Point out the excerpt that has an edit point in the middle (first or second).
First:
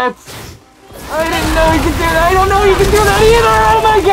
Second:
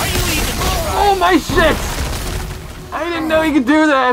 second